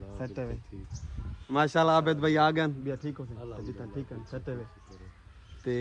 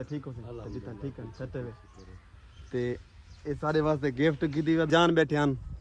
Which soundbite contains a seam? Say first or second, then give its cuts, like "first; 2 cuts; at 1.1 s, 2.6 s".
second; 1 cut; at 4.9 s